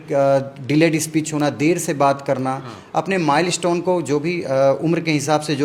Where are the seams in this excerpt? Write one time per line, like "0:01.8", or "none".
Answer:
none